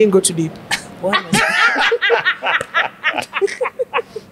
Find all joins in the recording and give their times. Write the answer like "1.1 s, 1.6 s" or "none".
none

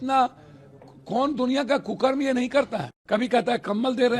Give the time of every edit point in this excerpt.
3.2 s

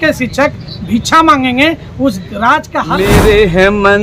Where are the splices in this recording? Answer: 2.8 s

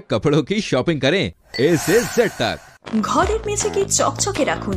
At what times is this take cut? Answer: 2.8 s

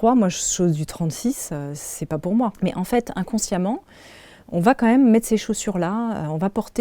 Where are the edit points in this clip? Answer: 2.6 s

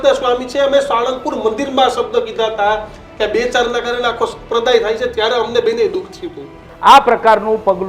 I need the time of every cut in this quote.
6.6 s

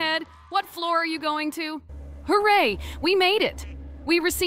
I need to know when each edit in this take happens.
1.9 s

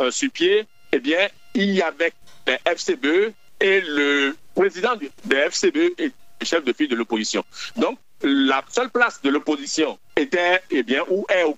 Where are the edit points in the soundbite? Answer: 2.3 s, 6.3 s

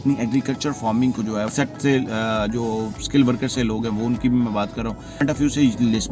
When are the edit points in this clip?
1.5 s, 5.2 s

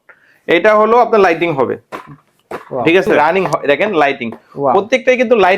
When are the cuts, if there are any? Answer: 3.1 s

